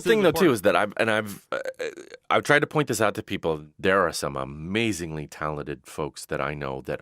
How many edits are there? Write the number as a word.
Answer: one